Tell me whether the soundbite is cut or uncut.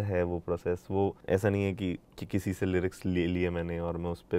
cut